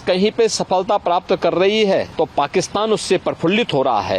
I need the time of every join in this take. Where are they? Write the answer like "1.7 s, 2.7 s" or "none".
2.1 s

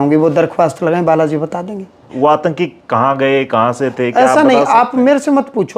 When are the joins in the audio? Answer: 2.1 s

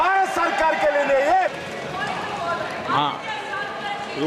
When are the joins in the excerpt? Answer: 1.6 s

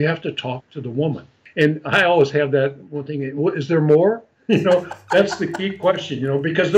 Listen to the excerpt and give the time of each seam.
1.4 s

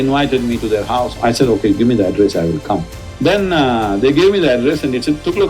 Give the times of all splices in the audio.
1.1 s, 3.0 s

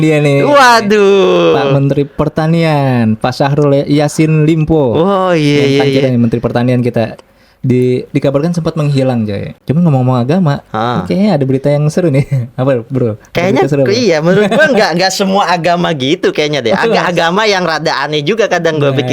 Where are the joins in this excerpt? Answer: 9.5 s

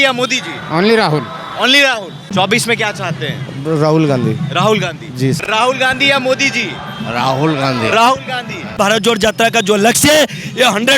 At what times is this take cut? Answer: 2.3 s, 5.4 s, 8.8 s

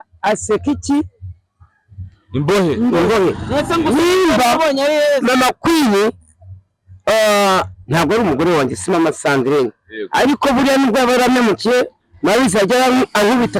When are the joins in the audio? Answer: none

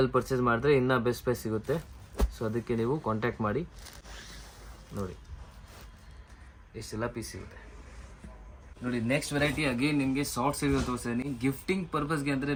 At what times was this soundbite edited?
none

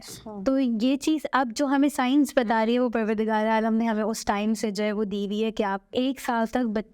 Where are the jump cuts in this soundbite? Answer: 5.9 s

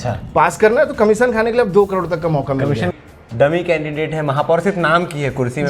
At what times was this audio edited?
2.9 s

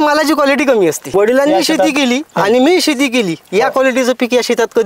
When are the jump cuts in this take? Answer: 1.1 s

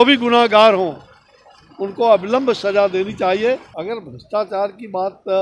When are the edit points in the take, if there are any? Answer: 3.7 s

